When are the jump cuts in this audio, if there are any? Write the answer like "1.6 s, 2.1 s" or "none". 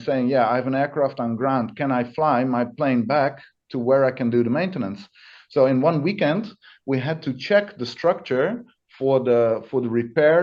none